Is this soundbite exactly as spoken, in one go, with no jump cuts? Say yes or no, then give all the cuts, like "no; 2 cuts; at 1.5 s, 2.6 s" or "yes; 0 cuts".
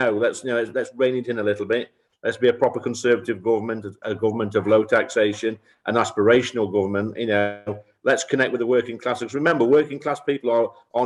yes; 0 cuts